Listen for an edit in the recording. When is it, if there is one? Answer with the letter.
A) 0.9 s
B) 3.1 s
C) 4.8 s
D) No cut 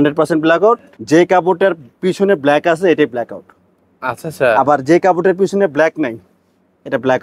A